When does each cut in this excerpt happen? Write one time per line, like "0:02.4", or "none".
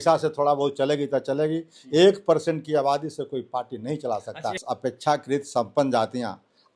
0:04.7